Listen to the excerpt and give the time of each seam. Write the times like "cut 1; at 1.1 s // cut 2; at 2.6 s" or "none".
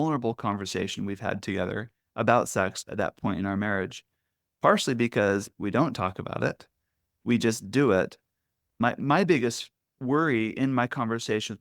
cut 1; at 8.8 s